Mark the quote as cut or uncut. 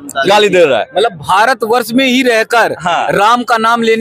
uncut